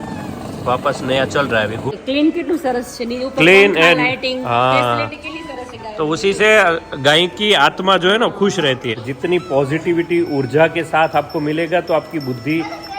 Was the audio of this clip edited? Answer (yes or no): yes